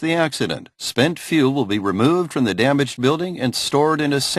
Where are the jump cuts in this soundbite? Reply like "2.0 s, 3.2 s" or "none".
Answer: none